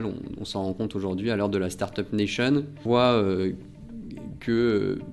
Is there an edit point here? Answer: yes; 1 cut; at 2.8 s

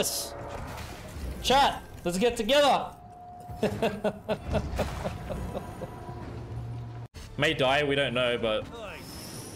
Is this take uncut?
no; 1 cut; at 7.1 s

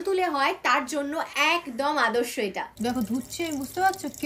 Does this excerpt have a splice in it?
yes; 1 cut; at 2.7 s

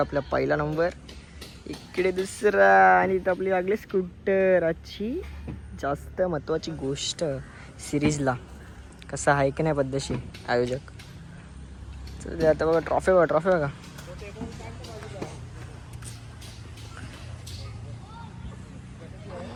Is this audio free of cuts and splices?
yes; 0 cuts

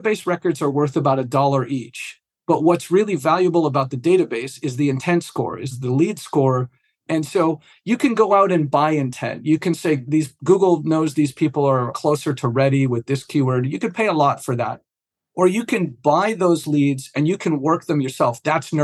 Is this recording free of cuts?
no; 2 cuts; at 5.8 s, 7.0 s

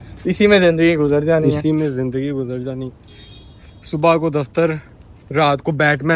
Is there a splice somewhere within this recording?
no; 0 cuts

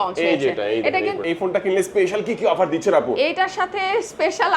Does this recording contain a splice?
yes; 1 cut; at 1.2 s

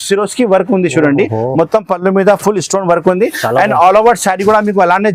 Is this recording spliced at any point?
no; 0 cuts

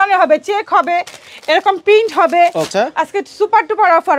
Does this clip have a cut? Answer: yes; 1 cut; at 2.7 s

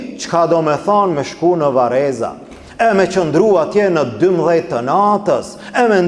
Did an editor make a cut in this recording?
no; 0 cuts

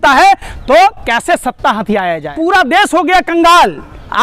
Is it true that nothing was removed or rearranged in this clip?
no; 1 cut; at 2.2 s

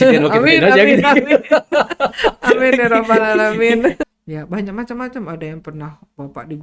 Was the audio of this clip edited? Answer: yes; 1 cut; at 4.0 s

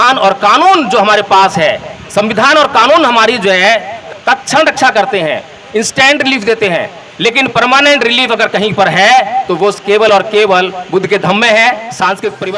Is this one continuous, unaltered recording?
no; 1 cut; at 4.0 s

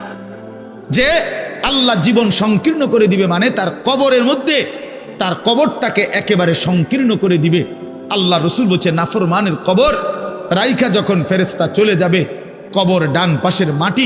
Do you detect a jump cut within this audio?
no; 0 cuts

